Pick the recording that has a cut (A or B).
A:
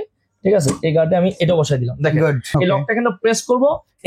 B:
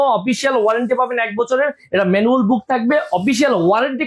A